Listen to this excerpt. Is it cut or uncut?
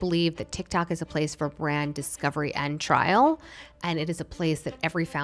uncut